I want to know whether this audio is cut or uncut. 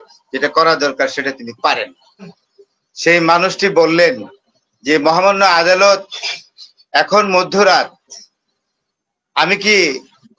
cut